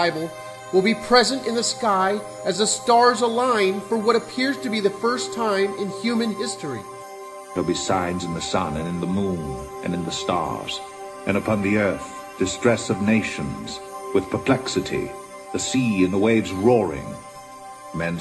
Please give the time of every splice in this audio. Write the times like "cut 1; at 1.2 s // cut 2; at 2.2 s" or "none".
none